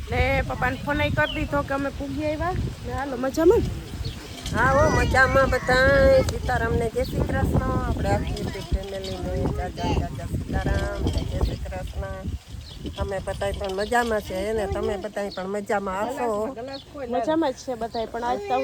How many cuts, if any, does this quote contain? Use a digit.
0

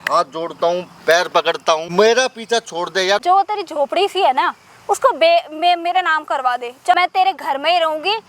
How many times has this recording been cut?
3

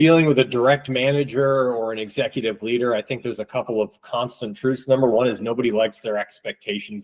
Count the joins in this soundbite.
0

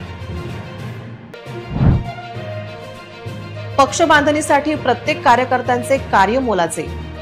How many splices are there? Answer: 1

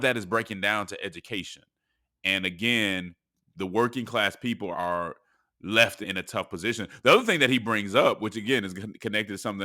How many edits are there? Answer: 2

